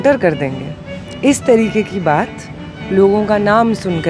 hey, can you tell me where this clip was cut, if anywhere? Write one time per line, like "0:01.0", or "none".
none